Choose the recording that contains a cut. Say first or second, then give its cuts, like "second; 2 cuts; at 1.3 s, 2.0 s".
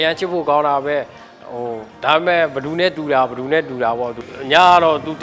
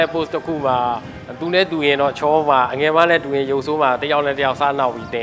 first; 1 cut; at 4.2 s